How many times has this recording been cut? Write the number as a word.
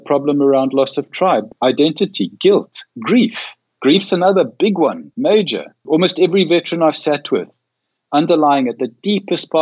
three